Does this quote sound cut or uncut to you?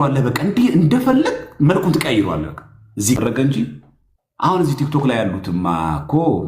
cut